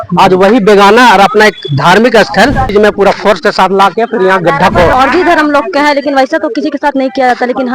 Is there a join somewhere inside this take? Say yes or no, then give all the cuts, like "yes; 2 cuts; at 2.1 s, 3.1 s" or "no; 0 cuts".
yes; 2 cuts; at 2.7 s, 4.9 s